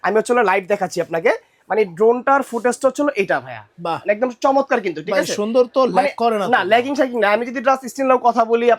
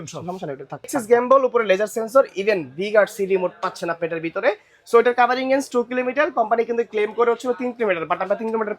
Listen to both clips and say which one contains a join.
second; 1 cut; at 1.0 s

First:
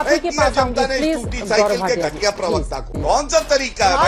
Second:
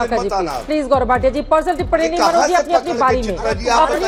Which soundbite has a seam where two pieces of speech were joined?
first; 1 cut; at 2.8 s

